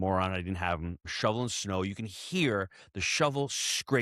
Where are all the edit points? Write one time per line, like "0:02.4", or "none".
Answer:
0:01.0